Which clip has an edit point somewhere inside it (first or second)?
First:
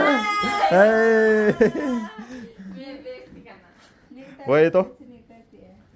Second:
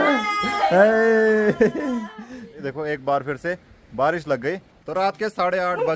second